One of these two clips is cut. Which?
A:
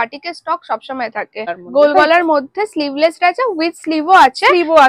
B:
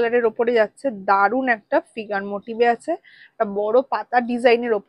A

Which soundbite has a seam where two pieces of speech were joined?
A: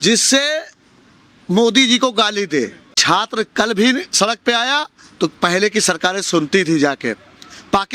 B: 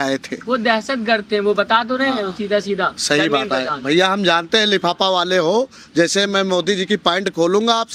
A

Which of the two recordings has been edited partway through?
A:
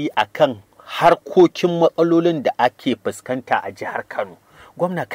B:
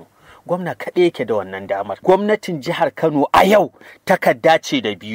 B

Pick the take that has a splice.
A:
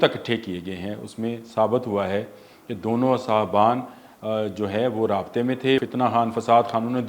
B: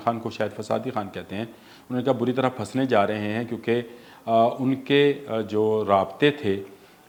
A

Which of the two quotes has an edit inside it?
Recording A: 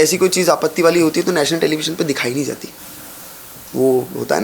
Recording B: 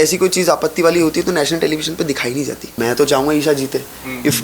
B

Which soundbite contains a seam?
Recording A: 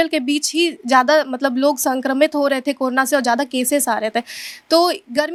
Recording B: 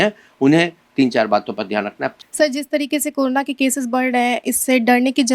B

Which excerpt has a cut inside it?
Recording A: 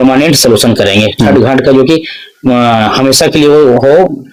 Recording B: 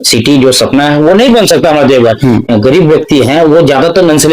B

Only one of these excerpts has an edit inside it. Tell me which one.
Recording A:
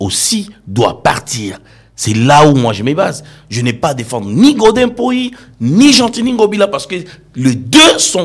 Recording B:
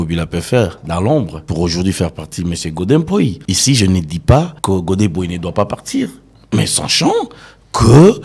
B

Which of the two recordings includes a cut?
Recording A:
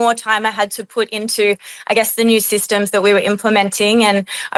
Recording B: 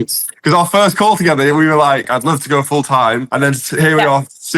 B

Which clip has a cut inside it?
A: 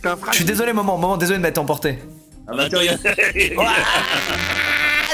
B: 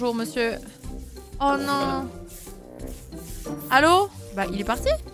B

